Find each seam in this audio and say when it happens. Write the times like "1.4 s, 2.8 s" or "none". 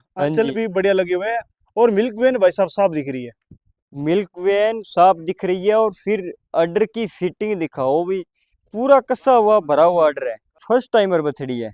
10.6 s